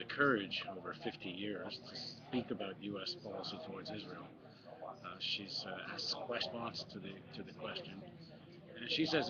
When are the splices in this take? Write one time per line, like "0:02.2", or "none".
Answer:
none